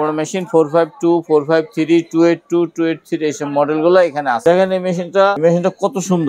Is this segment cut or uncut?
cut